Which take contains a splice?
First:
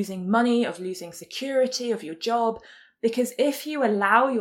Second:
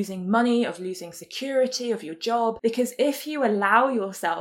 second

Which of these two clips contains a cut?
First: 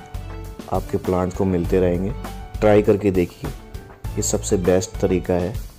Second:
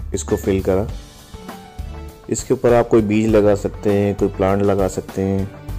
second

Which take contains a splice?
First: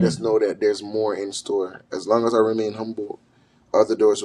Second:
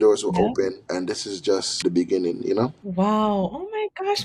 second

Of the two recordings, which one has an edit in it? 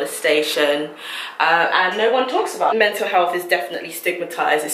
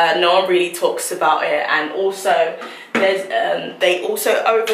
first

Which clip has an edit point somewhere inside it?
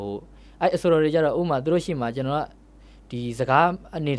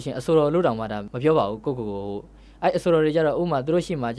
second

